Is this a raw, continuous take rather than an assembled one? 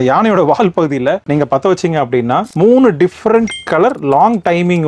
no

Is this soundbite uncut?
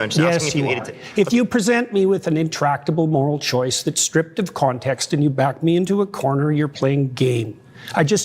no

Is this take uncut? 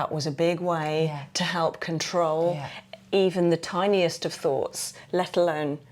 yes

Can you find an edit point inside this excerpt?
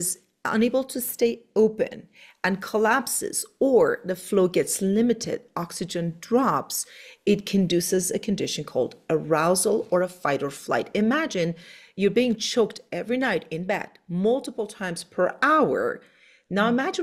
no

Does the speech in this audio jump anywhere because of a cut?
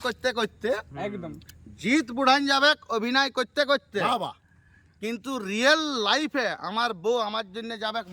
no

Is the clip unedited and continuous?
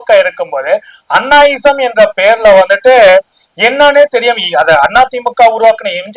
yes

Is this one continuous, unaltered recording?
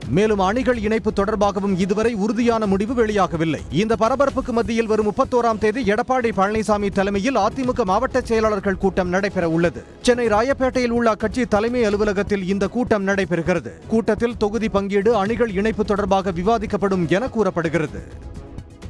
no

